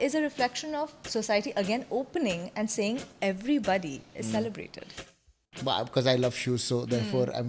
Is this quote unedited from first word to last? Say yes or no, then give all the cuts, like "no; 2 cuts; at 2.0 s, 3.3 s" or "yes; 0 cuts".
no; 1 cut; at 5.1 s